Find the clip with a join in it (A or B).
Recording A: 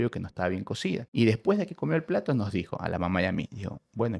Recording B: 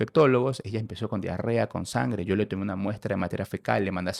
A